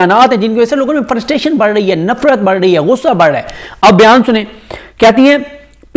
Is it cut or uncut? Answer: uncut